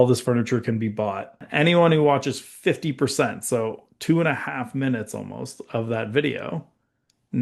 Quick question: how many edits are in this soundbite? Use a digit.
1